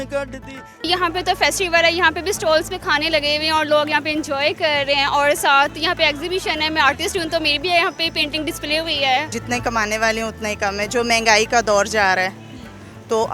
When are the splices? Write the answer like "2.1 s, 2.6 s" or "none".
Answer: 0.8 s, 9.4 s